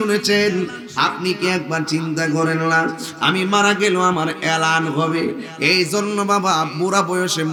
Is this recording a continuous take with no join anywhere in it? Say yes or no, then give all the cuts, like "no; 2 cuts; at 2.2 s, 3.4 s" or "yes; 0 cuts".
yes; 0 cuts